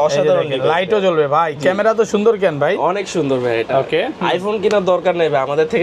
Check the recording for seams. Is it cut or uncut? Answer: uncut